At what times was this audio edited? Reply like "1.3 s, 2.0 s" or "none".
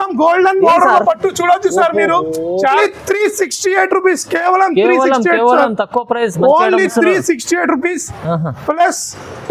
2.7 s